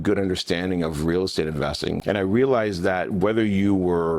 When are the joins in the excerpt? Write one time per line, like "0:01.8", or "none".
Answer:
0:02.0